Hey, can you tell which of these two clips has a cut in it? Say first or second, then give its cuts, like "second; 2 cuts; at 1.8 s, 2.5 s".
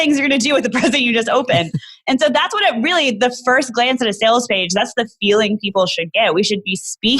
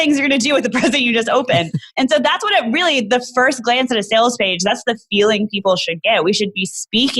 second; 1 cut; at 1.8 s